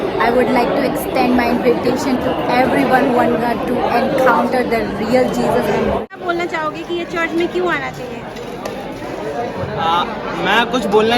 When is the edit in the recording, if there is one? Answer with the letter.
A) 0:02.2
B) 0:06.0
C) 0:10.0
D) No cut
B